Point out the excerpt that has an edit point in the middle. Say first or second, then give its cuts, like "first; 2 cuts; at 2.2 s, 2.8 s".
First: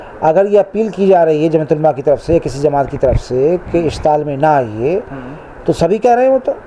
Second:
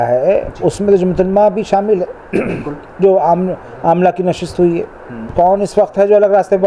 second; 1 cut; at 5.2 s